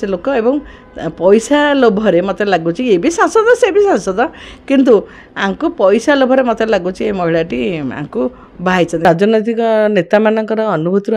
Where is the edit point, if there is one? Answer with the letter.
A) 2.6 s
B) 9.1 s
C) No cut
B